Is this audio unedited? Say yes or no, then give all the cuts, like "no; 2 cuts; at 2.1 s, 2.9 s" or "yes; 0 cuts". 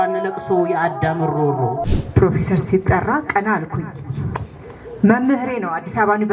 no; 1 cut; at 1.8 s